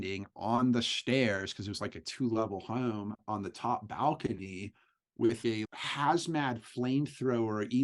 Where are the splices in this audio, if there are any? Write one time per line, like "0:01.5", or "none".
0:05.4